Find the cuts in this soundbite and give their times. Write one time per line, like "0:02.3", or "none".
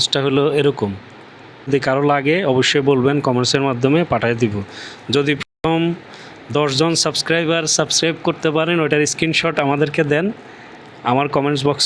0:01.7